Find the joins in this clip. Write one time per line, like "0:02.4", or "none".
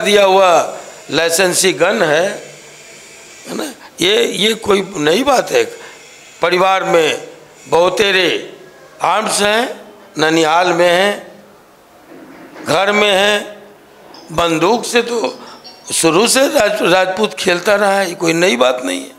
none